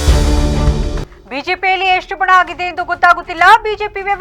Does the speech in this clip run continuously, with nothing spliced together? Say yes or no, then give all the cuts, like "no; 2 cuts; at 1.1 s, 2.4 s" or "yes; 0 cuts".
yes; 0 cuts